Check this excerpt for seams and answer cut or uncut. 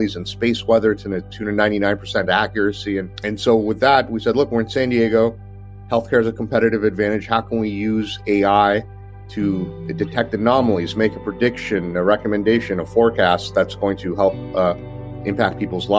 uncut